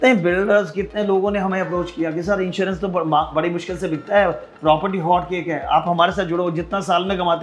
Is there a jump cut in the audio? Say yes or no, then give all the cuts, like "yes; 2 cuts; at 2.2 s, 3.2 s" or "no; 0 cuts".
no; 0 cuts